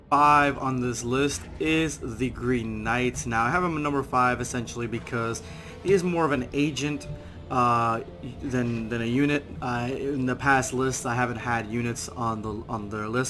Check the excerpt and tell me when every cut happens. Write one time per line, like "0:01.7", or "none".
0:08.4